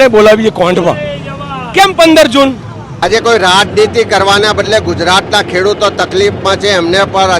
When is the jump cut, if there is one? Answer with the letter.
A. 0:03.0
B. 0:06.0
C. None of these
A